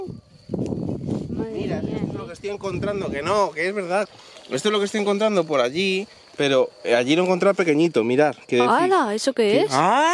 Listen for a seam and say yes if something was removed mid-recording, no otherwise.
no